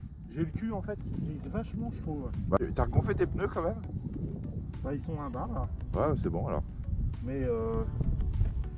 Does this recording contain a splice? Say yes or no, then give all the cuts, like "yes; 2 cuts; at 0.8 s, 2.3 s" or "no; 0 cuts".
yes; 1 cut; at 2.6 s